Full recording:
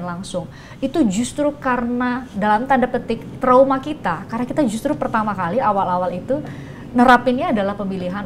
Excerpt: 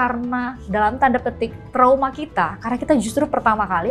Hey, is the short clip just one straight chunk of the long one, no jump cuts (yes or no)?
yes